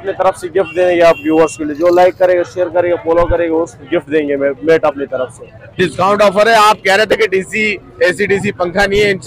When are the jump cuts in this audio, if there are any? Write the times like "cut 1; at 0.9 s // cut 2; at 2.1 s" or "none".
cut 1; at 5.8 s